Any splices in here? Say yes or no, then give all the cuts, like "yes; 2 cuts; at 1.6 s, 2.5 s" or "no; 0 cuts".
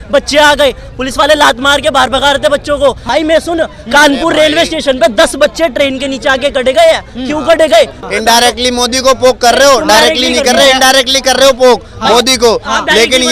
yes; 2 cuts; at 3.0 s, 8.0 s